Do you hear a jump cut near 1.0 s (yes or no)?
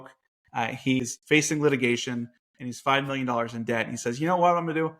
yes